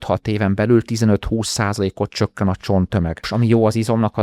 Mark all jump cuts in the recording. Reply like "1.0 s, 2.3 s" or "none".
3.3 s